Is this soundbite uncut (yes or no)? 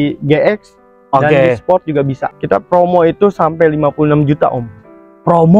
no